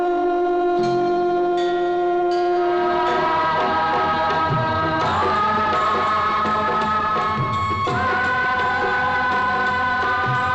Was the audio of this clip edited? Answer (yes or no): yes